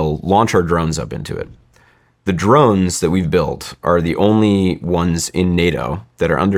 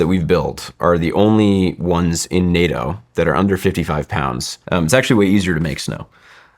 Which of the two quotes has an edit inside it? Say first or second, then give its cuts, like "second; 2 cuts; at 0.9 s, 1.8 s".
second; 1 cut; at 4.5 s